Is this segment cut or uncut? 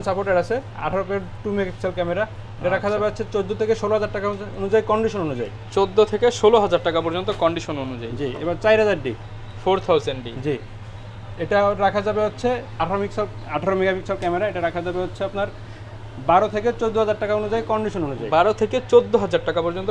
uncut